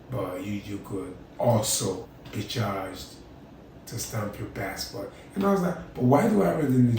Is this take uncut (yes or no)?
no